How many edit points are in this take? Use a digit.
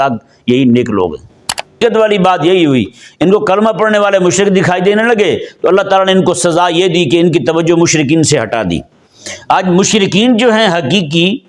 1